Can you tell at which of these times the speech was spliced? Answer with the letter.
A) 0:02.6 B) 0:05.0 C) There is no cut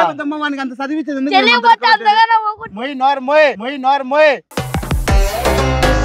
C